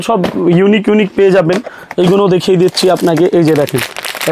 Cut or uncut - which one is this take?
uncut